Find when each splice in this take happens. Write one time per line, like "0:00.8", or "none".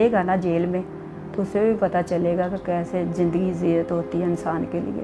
none